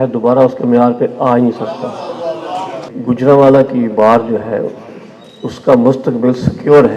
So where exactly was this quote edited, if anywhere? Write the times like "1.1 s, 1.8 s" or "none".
2.9 s